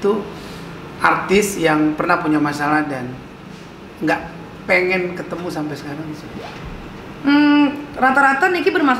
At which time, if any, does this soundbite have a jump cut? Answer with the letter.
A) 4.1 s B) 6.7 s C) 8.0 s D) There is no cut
D